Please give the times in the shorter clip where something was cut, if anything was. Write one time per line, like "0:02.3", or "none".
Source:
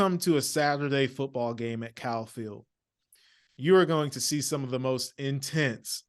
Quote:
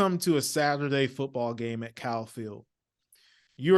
none